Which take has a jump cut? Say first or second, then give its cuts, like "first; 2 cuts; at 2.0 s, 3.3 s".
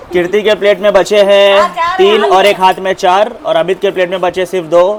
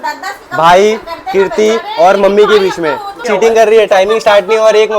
second; 1 cut; at 3.1 s